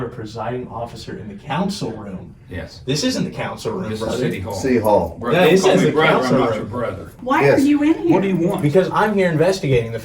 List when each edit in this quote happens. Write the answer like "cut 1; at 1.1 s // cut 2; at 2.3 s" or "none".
cut 1; at 7.1 s